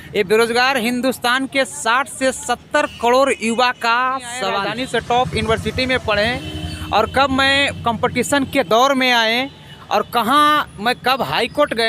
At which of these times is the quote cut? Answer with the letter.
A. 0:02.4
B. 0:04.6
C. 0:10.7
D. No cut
B